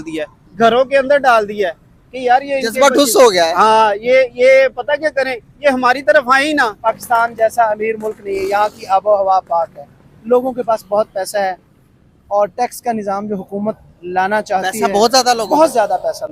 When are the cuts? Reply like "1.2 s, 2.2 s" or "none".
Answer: 6.8 s